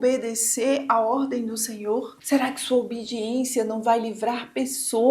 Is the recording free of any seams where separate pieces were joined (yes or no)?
no